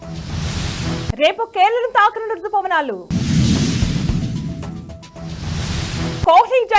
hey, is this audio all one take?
no; 1 cut; at 1.1 s

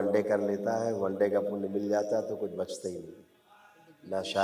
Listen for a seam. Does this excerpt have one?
no; 0 cuts

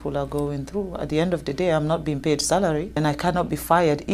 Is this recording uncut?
no; 1 cut; at 3.0 s

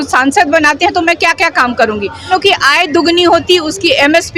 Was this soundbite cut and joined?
yes; 1 cut; at 2.2 s

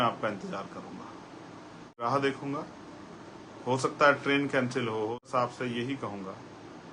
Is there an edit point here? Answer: yes; 2 cuts; at 2.0 s, 5.2 s

